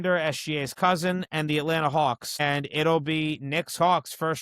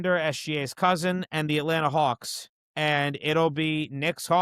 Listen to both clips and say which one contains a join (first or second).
first